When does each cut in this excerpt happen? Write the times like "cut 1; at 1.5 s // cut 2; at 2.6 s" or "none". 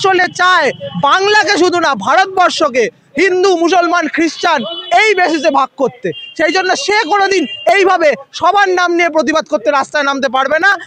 none

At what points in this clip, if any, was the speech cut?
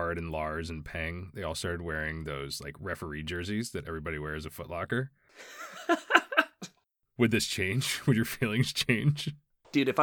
none

